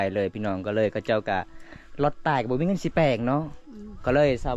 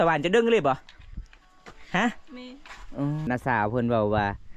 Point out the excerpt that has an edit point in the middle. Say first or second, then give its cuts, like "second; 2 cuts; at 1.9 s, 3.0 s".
second; 1 cut; at 3.2 s